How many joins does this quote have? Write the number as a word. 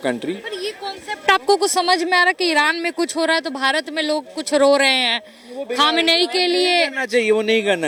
zero